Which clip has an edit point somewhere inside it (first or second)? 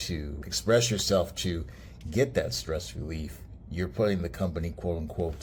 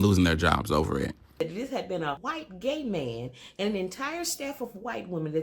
second